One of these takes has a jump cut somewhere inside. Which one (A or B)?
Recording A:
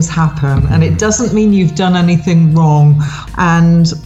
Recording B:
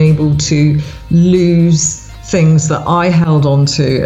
A